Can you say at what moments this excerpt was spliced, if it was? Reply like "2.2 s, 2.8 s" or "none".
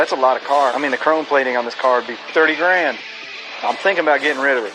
0.8 s, 2.2 s, 3.2 s

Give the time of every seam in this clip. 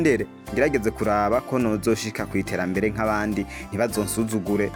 none

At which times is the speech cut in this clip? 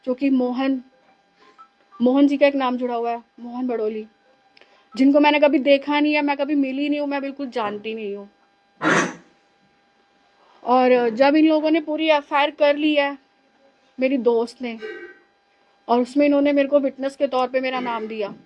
none

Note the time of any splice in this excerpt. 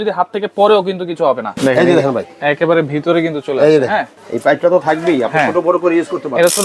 1.5 s, 4.2 s

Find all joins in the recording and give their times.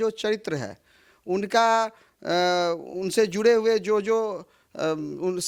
none

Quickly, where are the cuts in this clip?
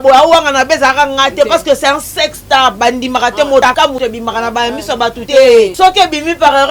3.8 s, 5.2 s, 5.7 s

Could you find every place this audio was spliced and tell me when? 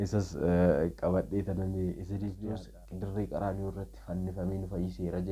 2.4 s

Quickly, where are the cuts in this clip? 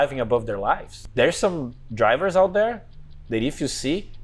1.0 s

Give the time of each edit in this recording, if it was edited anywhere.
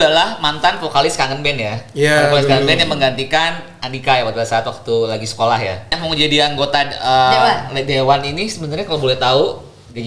6.0 s

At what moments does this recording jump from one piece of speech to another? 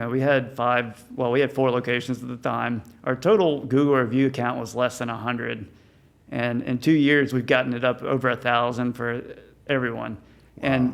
none

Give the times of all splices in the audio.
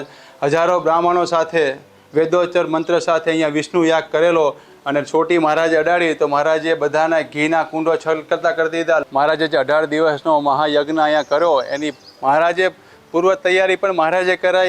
4.7 s, 9.0 s

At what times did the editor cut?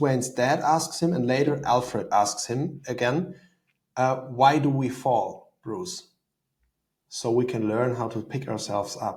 none

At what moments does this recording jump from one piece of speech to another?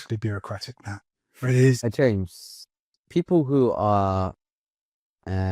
1.8 s

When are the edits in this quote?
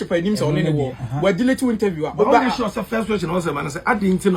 none

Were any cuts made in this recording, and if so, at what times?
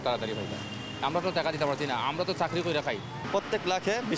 none

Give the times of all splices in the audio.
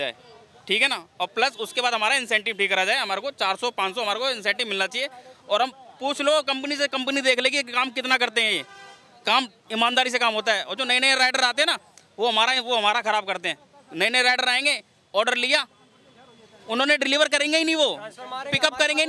none

